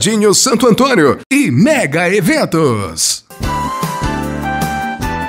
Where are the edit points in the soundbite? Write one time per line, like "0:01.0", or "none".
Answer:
none

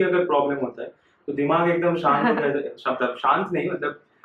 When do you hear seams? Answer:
none

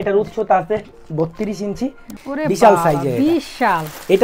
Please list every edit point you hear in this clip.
0:02.1

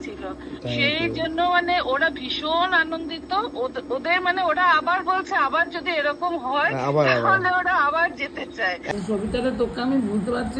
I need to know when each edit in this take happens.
0:08.9

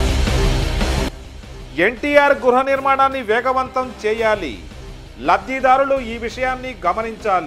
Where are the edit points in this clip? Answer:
none

